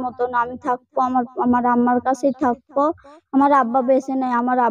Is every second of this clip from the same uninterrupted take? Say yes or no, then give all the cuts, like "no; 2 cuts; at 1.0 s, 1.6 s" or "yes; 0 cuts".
no; 1 cut; at 3.1 s